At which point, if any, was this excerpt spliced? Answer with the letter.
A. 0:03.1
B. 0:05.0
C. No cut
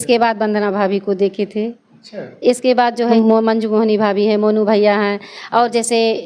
A